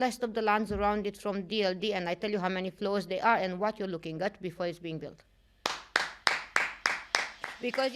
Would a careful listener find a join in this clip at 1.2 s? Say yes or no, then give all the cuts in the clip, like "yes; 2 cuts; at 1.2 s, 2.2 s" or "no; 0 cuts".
no; 0 cuts